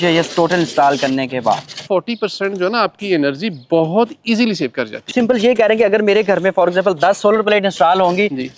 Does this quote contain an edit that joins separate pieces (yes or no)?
yes